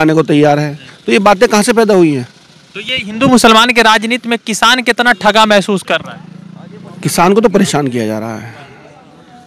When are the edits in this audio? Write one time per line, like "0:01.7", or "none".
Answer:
none

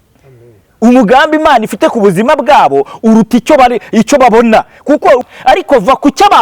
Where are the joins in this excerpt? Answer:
0:05.2

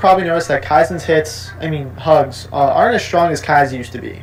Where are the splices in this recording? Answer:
none

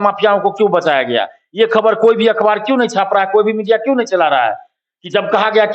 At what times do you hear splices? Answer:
none

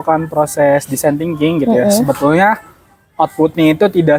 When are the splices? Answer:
none

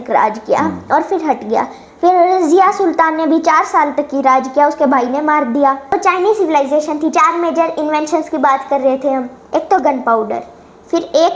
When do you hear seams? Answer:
0:05.9

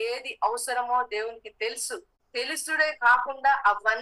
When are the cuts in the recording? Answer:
0:02.0

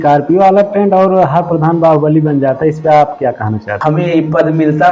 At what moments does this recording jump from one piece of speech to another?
0:03.7

